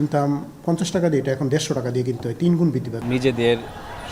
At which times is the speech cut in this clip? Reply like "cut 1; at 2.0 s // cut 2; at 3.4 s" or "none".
cut 1; at 2.9 s